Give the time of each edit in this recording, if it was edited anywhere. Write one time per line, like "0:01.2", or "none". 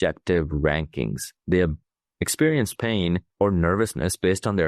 0:01.3
0:03.3